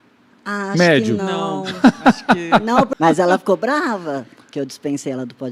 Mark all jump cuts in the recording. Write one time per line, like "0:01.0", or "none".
0:02.9